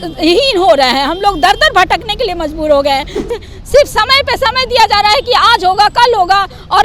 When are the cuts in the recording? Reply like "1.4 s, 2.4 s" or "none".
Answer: 3.3 s